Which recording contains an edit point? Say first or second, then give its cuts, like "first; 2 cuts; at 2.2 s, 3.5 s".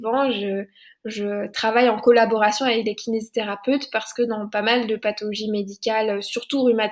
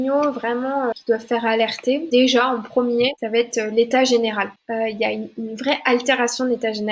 second; 4 cuts; at 0.9 s, 2.0 s, 3.2 s, 4.6 s